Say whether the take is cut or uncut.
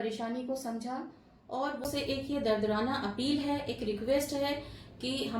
cut